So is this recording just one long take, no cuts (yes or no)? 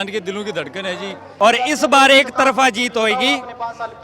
no